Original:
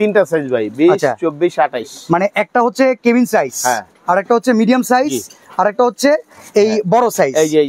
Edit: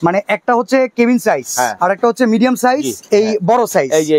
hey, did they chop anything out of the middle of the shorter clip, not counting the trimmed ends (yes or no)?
yes